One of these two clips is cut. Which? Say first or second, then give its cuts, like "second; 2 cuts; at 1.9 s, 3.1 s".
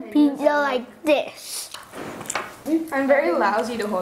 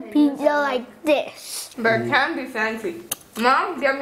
second; 1 cut; at 1.6 s